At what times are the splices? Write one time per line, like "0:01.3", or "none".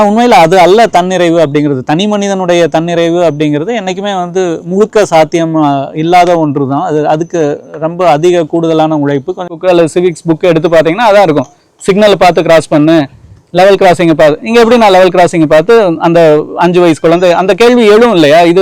0:09.5